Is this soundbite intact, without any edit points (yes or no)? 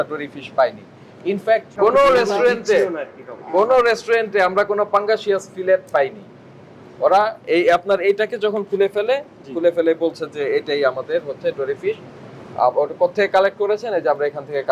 no